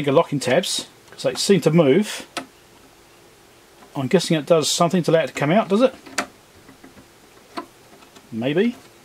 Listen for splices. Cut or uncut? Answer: uncut